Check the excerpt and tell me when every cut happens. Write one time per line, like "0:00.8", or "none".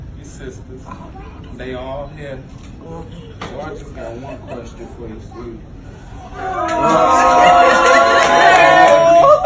none